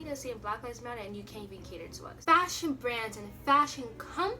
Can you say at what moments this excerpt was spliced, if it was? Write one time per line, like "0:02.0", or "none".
0:02.2